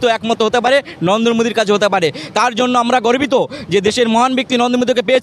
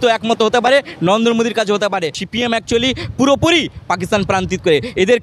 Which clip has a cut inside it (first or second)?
second